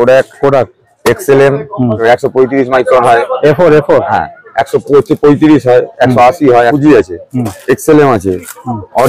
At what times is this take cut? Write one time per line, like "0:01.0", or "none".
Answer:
0:02.0
0:06.7